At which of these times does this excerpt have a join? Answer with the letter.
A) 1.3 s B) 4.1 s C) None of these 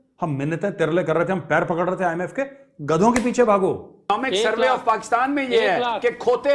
B